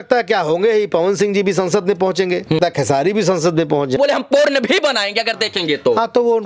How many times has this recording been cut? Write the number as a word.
two